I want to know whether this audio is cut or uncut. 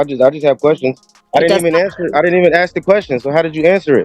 cut